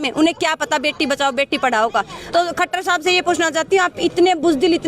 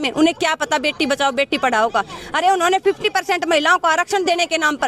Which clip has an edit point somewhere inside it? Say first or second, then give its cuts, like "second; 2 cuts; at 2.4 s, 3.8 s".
first; 1 cut; at 2.2 s